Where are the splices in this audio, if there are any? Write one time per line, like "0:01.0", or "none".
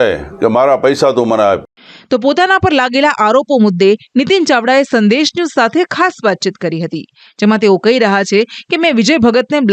none